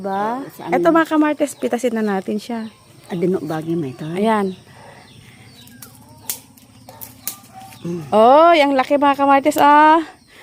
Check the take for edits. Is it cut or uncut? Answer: uncut